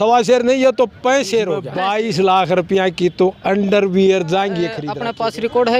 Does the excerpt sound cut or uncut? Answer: cut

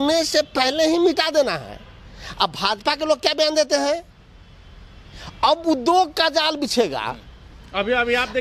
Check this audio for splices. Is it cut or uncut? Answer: uncut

